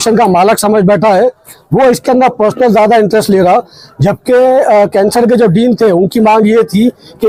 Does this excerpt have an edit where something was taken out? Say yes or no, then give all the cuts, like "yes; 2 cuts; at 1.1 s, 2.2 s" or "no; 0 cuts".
no; 0 cuts